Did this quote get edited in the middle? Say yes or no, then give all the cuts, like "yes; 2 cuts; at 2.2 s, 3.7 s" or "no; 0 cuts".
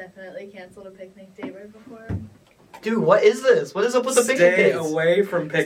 no; 0 cuts